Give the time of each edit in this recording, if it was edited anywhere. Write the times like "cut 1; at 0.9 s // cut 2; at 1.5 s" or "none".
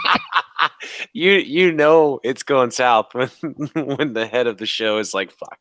none

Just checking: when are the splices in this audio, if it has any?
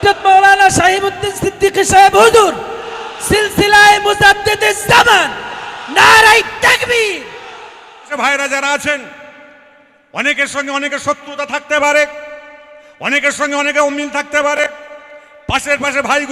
cut 1; at 8.1 s

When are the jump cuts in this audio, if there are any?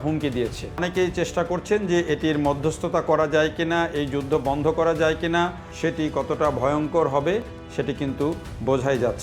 cut 1; at 0.8 s // cut 2; at 5.6 s

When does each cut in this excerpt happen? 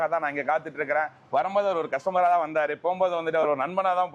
none

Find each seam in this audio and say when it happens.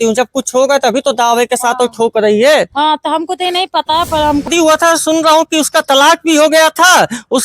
cut 1; at 4.5 s

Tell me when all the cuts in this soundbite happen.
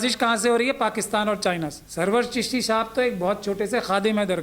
cut 1; at 1.8 s

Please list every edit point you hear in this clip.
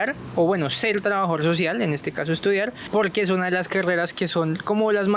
cut 1; at 2.8 s

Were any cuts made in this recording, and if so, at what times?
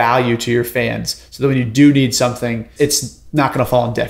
cut 1; at 2.7 s

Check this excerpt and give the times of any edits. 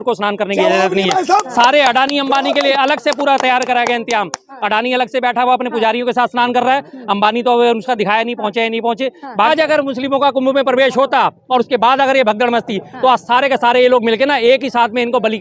cut 1; at 9.5 s

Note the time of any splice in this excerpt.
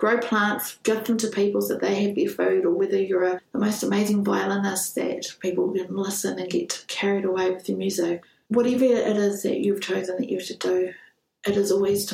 cut 1; at 8.2 s

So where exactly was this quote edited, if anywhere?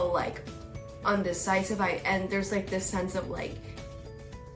none

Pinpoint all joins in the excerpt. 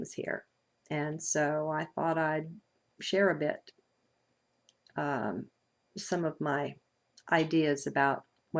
none

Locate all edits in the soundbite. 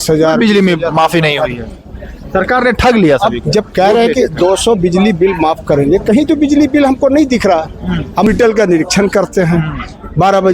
cut 1; at 8.3 s

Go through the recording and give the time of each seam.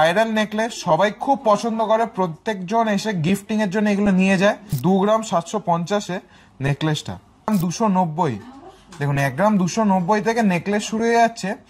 cut 1; at 4.8 s // cut 2; at 7.5 s

